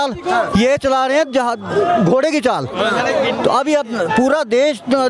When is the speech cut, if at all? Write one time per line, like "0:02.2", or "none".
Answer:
none